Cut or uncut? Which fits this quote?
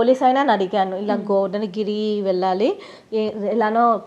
uncut